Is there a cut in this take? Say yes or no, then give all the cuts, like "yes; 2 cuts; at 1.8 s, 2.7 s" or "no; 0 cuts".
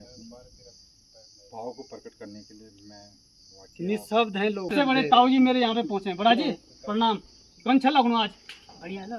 yes; 1 cut; at 4.7 s